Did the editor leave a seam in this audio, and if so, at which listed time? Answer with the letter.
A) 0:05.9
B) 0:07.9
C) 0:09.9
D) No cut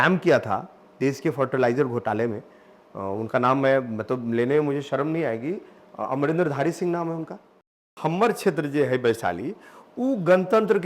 B